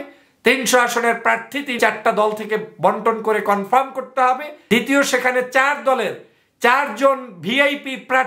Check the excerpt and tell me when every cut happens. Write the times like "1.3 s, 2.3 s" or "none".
1.8 s, 4.5 s